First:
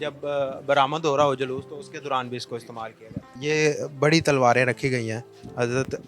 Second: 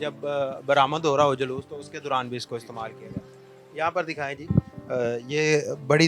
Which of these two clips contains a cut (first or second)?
first